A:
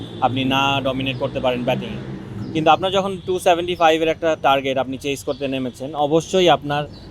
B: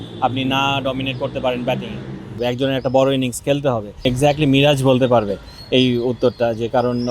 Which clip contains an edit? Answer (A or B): B